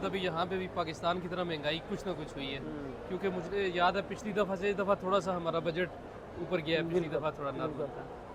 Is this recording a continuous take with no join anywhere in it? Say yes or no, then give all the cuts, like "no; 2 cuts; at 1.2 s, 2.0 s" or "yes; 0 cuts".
yes; 0 cuts